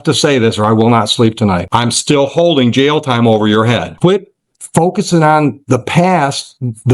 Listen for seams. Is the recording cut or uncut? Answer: cut